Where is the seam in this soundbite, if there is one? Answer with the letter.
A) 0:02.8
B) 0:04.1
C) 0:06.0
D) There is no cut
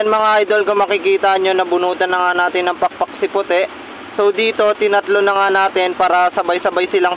D